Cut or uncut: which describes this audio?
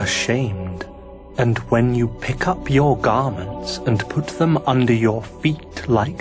uncut